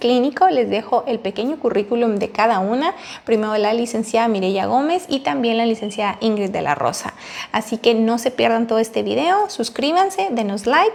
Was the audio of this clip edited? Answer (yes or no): no